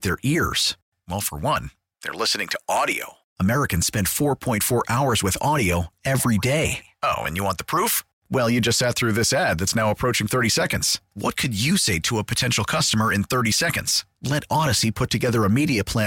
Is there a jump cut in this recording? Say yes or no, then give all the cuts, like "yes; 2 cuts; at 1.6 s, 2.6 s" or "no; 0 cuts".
no; 0 cuts